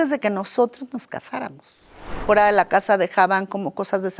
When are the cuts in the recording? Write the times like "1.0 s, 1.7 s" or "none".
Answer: 2.2 s